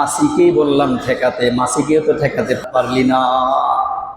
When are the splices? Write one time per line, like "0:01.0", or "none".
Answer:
0:02.6